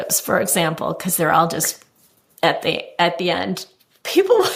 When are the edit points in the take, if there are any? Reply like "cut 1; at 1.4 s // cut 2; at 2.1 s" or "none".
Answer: none